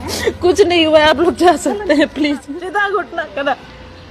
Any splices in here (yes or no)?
yes